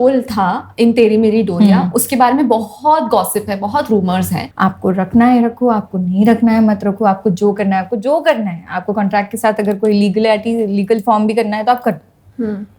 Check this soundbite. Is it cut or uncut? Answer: cut